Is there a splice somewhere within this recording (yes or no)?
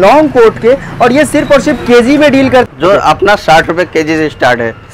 yes